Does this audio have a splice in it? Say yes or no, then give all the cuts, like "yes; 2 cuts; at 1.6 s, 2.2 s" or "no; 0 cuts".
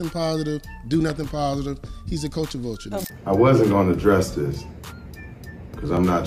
yes; 1 cut; at 3.1 s